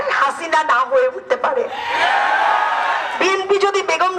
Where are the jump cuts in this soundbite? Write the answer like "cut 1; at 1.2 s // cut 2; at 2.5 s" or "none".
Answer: cut 1; at 3.1 s